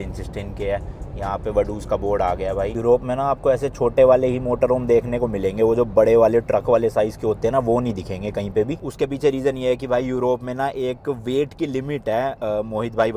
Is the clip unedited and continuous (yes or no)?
yes